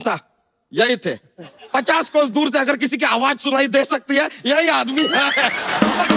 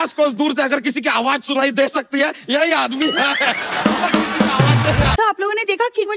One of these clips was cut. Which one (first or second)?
second